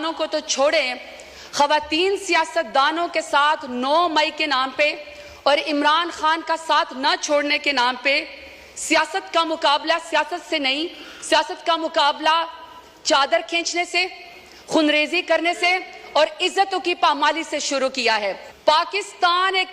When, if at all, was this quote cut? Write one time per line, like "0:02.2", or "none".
0:18.5